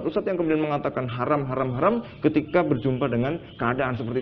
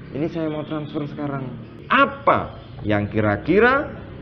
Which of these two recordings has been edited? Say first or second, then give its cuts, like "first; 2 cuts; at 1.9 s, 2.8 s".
second; 1 cut; at 1.8 s